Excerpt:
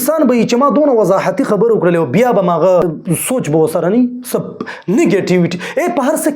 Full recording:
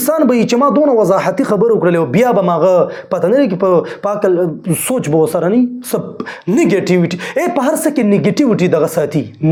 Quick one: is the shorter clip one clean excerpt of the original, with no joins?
no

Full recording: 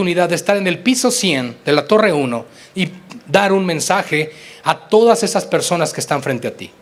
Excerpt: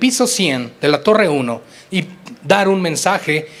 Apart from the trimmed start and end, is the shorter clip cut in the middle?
no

